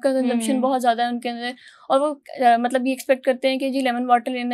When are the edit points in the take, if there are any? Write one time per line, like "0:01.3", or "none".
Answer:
none